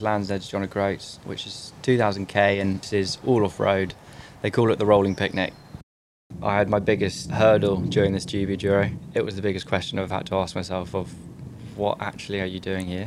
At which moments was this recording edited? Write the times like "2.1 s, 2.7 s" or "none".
1.2 s, 2.8 s, 6.1 s, 7.2 s, 9.0 s